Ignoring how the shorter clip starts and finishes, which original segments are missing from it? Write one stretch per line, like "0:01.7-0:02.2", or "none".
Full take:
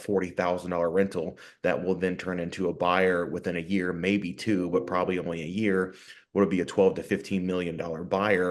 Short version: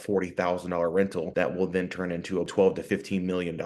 0:01.3-0:01.6
0:02.8-0:06.7